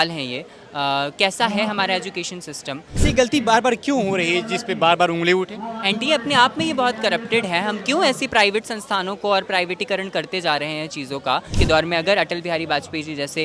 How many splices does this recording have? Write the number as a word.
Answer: two